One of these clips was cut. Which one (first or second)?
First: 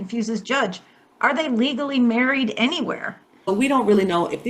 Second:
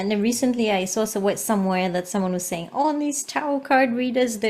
first